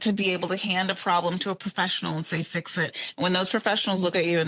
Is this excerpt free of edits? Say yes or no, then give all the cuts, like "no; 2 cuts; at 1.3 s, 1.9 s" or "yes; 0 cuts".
yes; 0 cuts